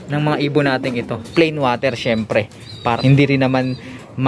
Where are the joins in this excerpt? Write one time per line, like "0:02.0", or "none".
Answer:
0:01.1
0:03.0

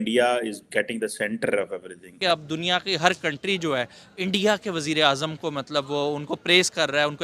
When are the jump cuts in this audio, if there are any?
0:02.2

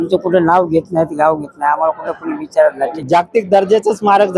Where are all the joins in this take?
0:02.9

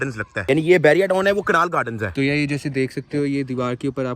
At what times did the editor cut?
0:02.1

